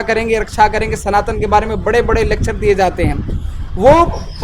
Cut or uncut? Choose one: uncut